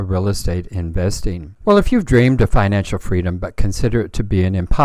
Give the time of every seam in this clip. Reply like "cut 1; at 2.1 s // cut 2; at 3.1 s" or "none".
cut 1; at 1.5 s